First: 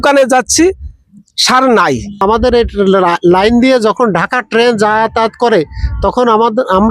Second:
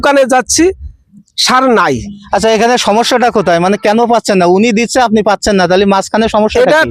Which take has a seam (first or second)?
first